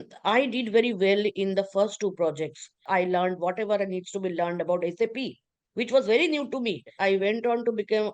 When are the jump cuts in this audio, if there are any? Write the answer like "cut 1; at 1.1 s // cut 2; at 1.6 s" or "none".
cut 1; at 2.8 s // cut 2; at 6.9 s